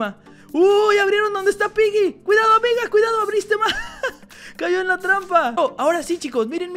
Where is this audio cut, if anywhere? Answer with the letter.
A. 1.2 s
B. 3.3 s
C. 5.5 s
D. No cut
C